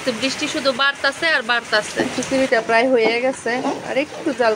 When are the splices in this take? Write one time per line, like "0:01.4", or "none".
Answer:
0:02.0